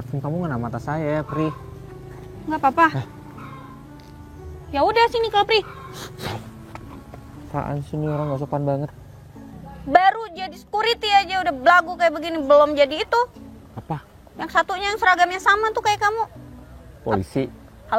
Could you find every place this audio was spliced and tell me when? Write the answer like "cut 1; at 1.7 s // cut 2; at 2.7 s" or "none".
cut 1; at 9.7 s